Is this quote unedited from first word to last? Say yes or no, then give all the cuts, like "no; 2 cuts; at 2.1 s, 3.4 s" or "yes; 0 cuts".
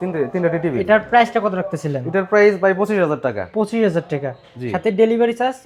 yes; 0 cuts